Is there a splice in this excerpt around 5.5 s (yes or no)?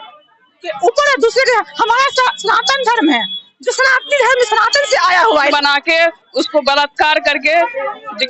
yes